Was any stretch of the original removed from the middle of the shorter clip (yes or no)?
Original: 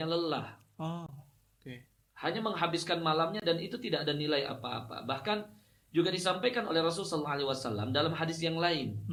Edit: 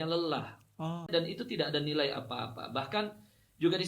yes